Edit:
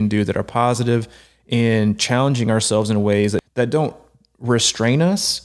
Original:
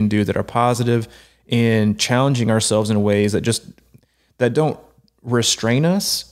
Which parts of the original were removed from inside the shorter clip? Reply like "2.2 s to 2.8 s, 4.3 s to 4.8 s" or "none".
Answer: 3.4 s to 4.3 s